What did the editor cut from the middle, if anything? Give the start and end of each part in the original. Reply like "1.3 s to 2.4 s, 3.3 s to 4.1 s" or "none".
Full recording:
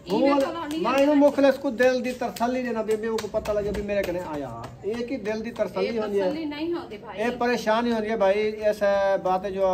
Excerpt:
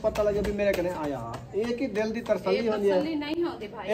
none